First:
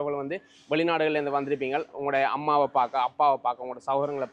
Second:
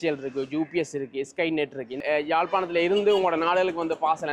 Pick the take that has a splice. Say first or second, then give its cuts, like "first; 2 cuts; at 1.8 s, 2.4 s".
second; 1 cut; at 2.0 s